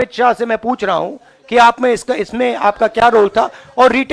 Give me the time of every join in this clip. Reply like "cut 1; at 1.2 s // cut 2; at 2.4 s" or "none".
none